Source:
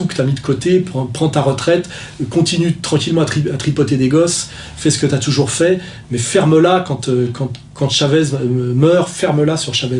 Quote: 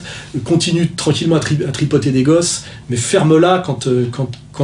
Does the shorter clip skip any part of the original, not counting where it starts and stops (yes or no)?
yes